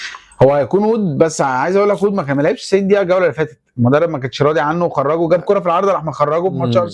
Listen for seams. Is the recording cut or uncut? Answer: uncut